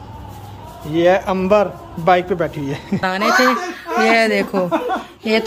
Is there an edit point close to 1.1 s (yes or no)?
no